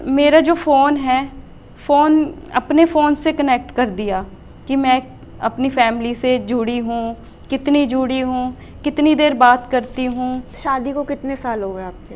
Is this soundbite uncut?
no; 1 cut; at 10.5 s

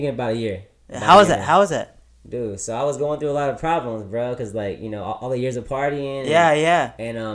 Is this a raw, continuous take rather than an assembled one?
yes; 0 cuts

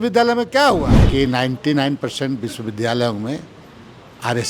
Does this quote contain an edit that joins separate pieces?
yes; 1 cut; at 1.0 s

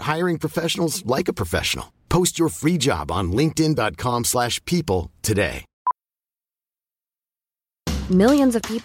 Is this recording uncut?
no; 1 cut; at 5.7 s

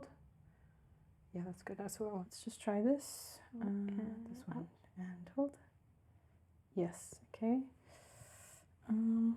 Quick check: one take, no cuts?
no; 1 cut; at 2.3 s

